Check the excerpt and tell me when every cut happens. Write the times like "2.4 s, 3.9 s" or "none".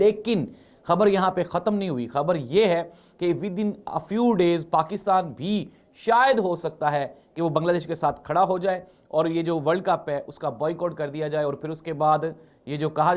none